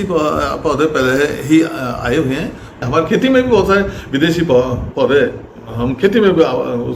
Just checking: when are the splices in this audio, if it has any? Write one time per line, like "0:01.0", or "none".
0:02.8